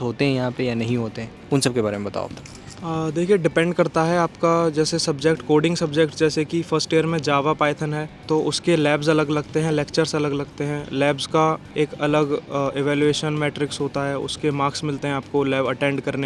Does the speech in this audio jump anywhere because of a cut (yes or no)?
no